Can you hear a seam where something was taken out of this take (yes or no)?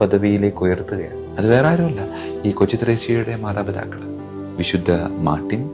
no